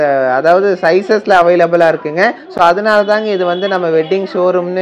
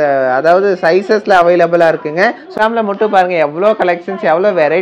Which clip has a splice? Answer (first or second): second